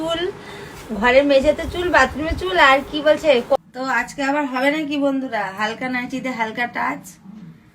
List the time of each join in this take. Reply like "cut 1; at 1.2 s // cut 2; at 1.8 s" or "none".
cut 1; at 3.5 s